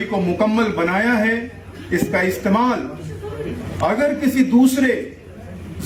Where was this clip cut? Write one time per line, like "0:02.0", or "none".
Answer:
none